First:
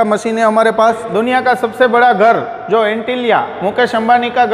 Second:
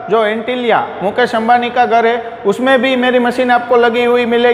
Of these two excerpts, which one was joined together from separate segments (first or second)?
first